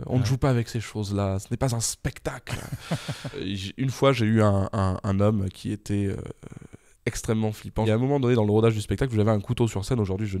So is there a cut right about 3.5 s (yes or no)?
yes